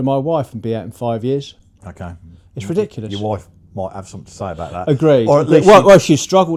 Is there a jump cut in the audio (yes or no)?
no